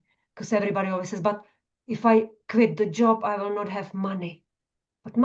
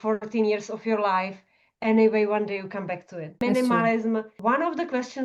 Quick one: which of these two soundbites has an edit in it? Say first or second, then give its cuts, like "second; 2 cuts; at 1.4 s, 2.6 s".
second; 2 cuts; at 3.4 s, 4.3 s